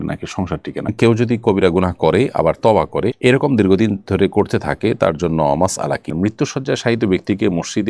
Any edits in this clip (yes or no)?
yes